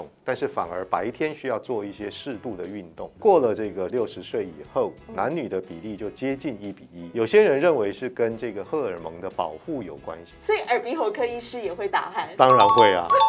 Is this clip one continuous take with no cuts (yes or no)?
no